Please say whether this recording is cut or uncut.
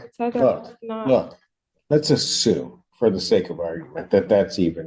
uncut